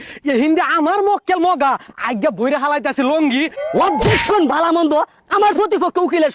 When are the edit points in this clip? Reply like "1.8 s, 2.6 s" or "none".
3.6 s